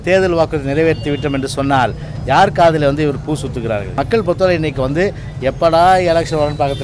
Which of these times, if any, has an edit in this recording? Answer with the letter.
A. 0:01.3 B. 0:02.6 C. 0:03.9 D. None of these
C